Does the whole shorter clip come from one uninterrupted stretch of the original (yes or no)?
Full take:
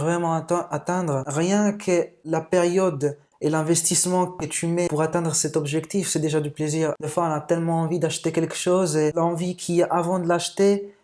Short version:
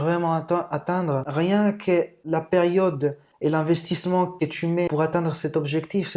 yes